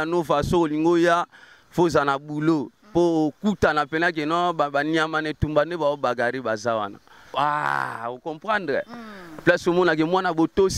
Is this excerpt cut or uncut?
cut